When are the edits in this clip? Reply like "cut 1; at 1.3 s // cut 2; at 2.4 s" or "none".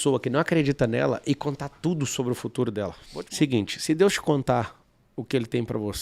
cut 1; at 3.0 s

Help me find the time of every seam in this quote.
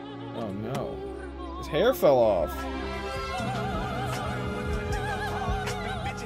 none

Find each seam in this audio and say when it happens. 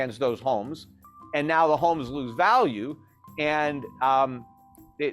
none

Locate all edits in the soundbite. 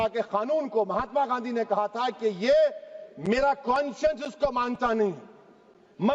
none

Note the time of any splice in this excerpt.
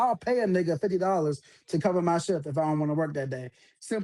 none

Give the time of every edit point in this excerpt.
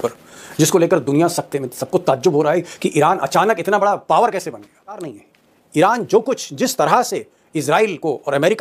cut 1; at 5.1 s

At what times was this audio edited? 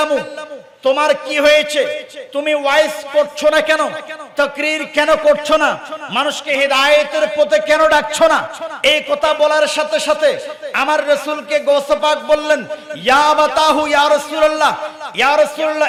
none

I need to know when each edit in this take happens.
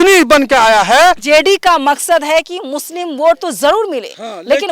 cut 1; at 1.2 s

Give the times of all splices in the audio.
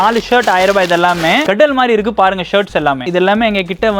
cut 1; at 1.4 s // cut 2; at 3.1 s

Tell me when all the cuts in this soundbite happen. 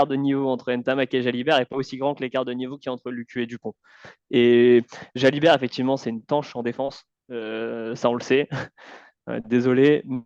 none

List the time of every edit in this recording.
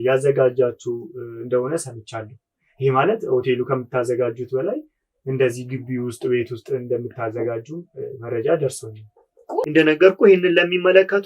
cut 1; at 9.5 s

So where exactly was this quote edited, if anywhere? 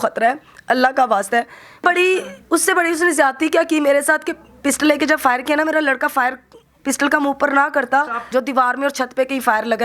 cut 1; at 1.8 s // cut 2; at 8.2 s

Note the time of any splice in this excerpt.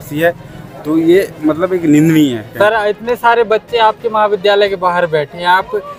cut 1; at 2.5 s

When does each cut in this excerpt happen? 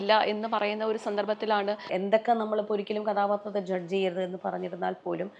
cut 1; at 1.9 s

